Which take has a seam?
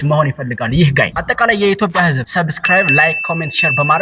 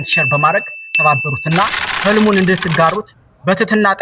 first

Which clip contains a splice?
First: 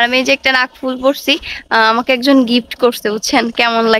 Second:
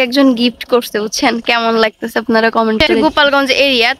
second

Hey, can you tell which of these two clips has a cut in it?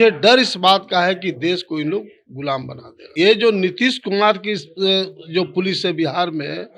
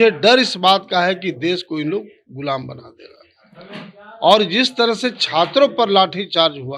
first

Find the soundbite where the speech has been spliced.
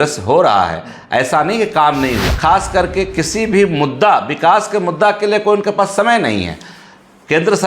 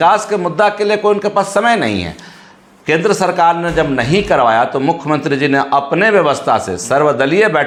first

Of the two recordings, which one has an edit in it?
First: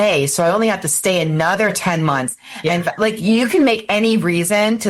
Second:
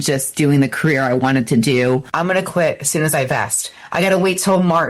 second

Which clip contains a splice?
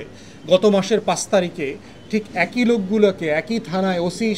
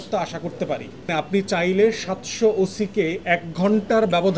second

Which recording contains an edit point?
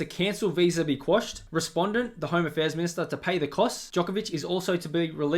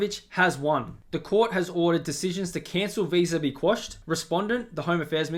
first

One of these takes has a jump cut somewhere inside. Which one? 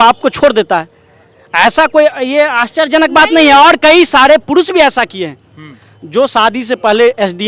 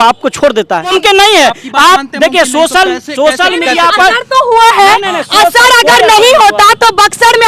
second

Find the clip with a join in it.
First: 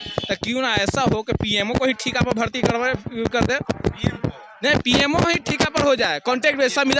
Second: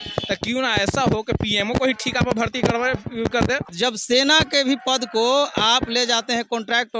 second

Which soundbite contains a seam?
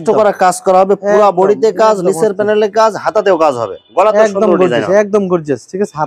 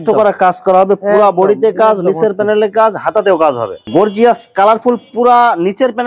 second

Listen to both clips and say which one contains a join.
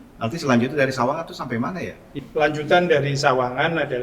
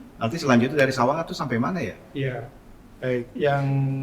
first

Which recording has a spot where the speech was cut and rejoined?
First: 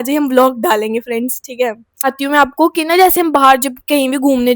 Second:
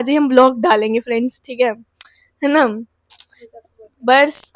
first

